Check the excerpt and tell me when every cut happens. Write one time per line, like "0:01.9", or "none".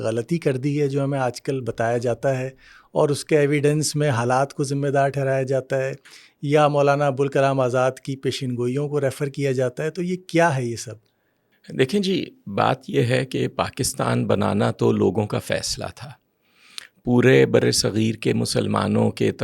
none